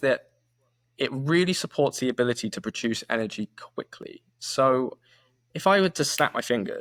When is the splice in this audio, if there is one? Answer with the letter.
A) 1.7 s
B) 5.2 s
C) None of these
C